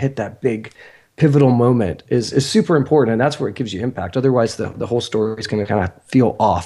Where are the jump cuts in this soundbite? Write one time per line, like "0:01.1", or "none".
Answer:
none